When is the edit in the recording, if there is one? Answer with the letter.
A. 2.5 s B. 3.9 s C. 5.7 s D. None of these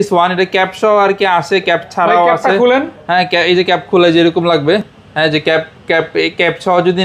D